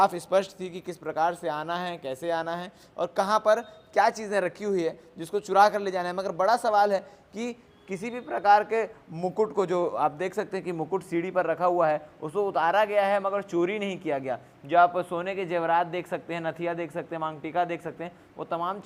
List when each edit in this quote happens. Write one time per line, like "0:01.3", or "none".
none

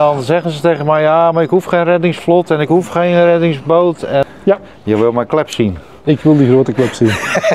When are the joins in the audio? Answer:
0:04.3

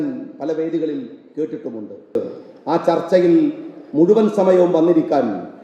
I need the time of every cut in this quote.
0:02.2

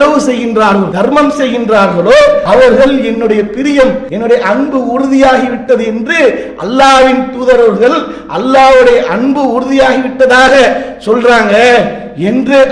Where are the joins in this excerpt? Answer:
0:00.9
0:02.4
0:04.1

